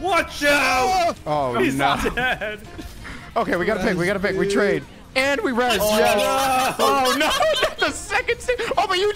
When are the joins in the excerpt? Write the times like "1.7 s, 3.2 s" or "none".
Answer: none